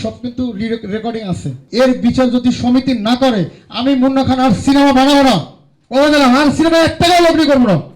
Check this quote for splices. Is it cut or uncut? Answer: cut